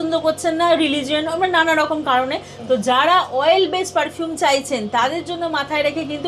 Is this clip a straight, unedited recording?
yes; 0 cuts

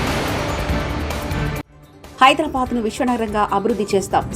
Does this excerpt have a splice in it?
no; 0 cuts

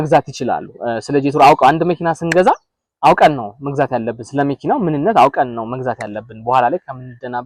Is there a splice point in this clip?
no; 0 cuts

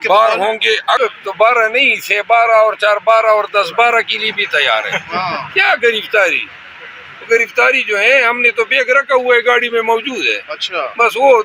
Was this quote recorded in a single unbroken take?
no; 1 cut; at 1.0 s

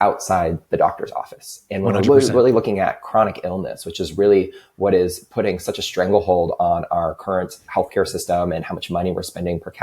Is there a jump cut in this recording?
no; 0 cuts

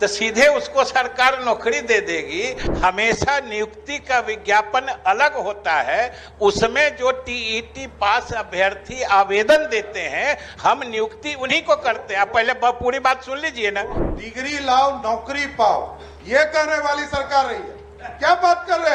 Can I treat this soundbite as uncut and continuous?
no; 2 cuts; at 2.6 s, 14.0 s

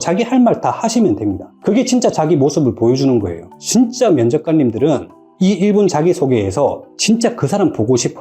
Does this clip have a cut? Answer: yes; 1 cut; at 3.5 s

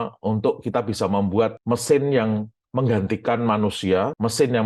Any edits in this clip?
no; 0 cuts

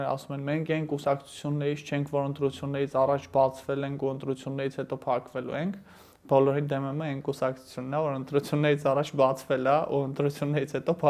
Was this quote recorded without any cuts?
yes; 0 cuts

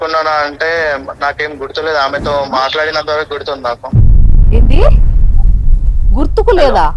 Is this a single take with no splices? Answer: yes; 0 cuts

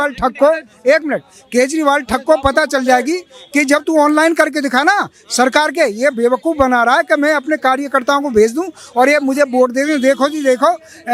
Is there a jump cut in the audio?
no; 0 cuts

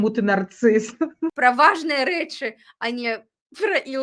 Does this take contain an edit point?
yes; 1 cut; at 1.3 s

